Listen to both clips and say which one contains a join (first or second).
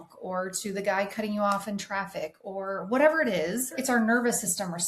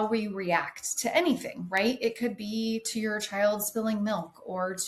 first